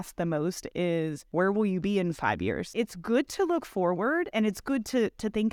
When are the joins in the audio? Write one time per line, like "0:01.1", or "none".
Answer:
0:01.2
0:02.7
0:04.3